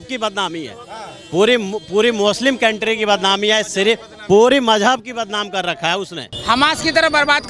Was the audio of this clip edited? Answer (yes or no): yes